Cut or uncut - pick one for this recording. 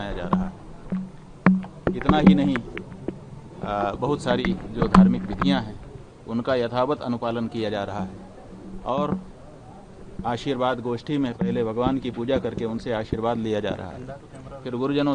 uncut